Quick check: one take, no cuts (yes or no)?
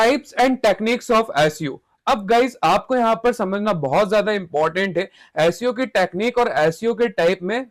yes